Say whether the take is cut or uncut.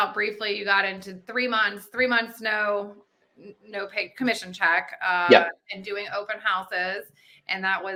uncut